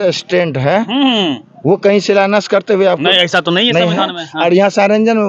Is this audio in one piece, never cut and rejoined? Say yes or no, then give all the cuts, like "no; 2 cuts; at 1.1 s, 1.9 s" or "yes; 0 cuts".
yes; 0 cuts